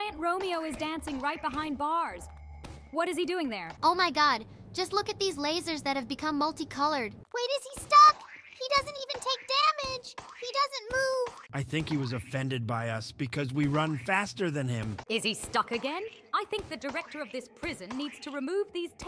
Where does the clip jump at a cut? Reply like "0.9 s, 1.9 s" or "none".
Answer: 3.7 s, 7.2 s, 11.4 s, 14.9 s